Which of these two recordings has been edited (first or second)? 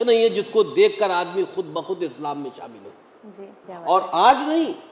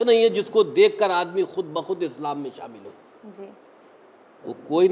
first